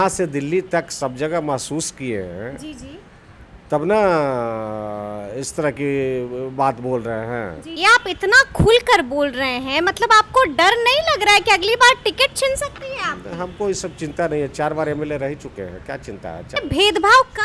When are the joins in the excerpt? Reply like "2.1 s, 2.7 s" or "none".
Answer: 7.7 s, 16.6 s